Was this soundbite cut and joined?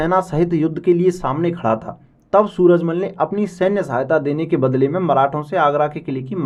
no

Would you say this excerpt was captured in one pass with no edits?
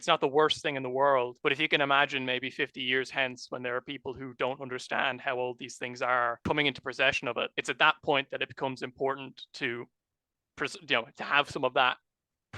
no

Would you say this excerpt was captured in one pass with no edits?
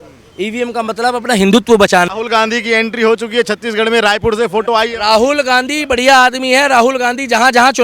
no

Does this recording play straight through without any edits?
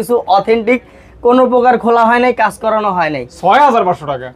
yes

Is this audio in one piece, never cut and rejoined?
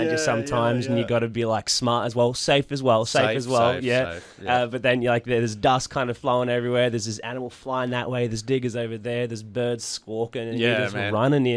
yes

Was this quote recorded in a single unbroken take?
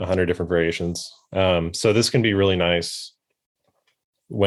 yes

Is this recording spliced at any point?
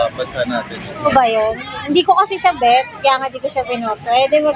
yes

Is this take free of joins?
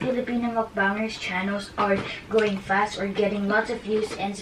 yes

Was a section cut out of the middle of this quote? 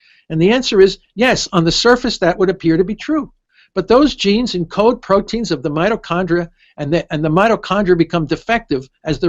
no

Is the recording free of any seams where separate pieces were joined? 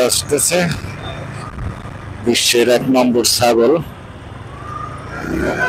yes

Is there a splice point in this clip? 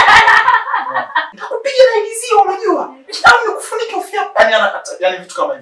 yes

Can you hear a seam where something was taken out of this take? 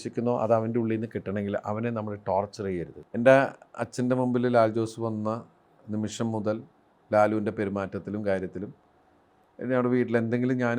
yes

